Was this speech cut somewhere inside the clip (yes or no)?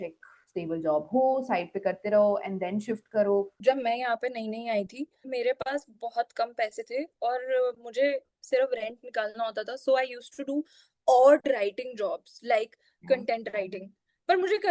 yes